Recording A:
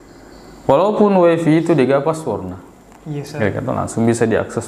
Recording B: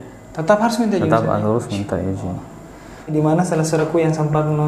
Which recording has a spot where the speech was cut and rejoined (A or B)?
B